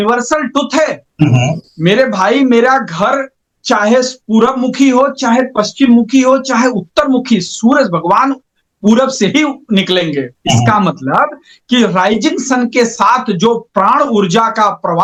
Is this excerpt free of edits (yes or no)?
yes